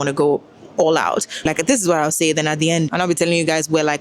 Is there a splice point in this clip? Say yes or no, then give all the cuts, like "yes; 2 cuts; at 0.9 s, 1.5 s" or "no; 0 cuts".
yes; 1 cut; at 1.4 s